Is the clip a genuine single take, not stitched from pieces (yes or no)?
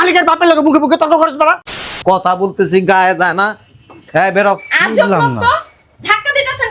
no